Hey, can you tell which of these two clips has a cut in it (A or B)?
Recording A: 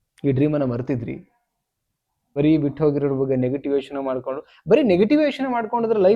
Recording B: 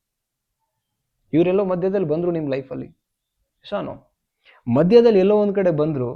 A